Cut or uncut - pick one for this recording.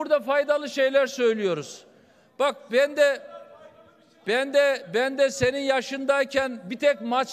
uncut